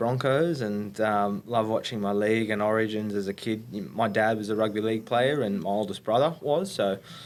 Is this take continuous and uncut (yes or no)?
yes